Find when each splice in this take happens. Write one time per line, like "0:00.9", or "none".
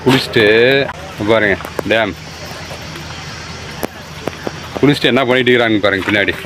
0:01.0